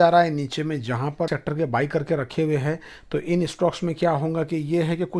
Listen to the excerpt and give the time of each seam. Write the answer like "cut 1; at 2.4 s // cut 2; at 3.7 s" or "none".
cut 1; at 1.3 s